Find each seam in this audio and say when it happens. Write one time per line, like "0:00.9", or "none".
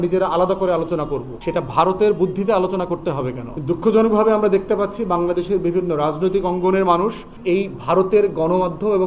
0:01.3
0:03.5
0:07.3